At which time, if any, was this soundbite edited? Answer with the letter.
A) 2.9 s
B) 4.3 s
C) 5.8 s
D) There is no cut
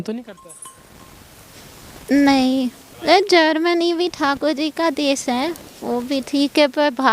A